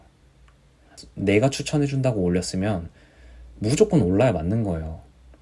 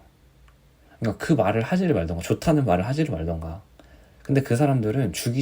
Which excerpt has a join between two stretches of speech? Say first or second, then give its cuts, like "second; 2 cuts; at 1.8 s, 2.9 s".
first; 1 cut; at 1.0 s